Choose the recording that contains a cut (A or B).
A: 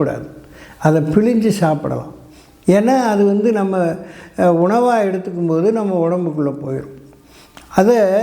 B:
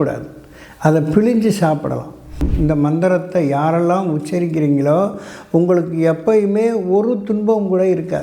B